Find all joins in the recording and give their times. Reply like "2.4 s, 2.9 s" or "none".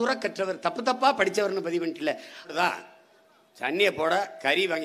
2.5 s